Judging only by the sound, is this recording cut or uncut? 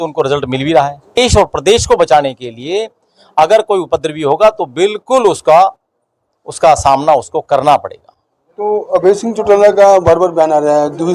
cut